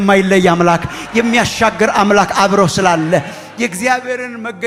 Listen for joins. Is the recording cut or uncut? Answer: uncut